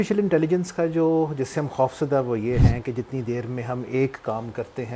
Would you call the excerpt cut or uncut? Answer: uncut